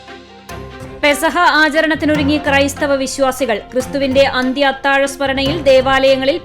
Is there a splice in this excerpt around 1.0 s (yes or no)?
yes